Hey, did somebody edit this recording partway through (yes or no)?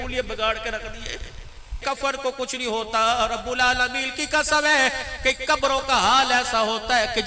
yes